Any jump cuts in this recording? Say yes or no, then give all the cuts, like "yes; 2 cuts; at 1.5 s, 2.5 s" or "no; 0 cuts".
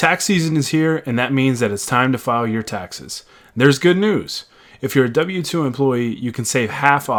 no; 0 cuts